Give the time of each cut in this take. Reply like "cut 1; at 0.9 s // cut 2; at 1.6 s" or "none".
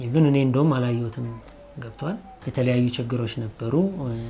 cut 1; at 2.4 s